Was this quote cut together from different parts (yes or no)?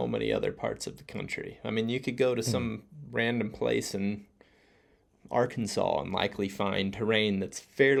no